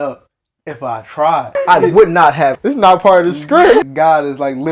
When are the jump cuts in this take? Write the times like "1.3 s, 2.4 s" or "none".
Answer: 1.5 s, 2.6 s, 3.8 s